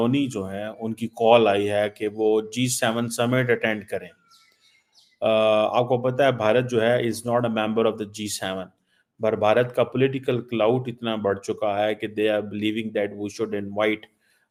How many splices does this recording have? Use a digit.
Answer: 0